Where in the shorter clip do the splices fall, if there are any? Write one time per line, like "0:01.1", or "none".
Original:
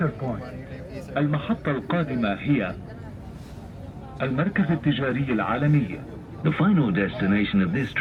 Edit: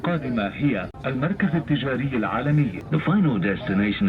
0:00.9
0:02.8